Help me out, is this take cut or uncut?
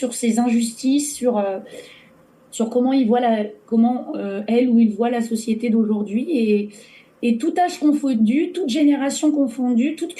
uncut